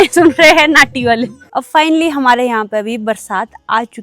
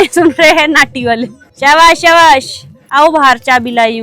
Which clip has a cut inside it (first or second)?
first